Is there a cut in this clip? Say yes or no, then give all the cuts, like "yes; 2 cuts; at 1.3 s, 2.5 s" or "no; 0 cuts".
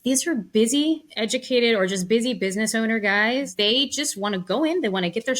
yes; 2 cuts; at 1.1 s, 3.5 s